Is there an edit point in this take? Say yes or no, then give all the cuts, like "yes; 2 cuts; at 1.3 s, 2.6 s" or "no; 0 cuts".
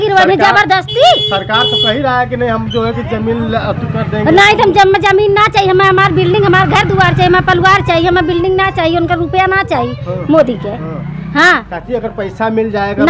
no; 0 cuts